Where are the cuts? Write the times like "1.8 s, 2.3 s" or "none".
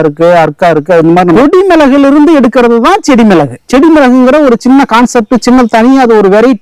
1.4 s, 3.6 s